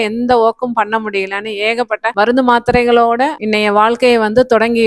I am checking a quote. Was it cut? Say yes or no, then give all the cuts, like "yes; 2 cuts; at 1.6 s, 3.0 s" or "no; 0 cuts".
yes; 2 cuts; at 2.1 s, 3.4 s